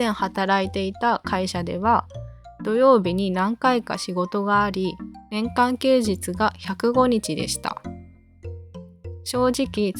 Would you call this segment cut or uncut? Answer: uncut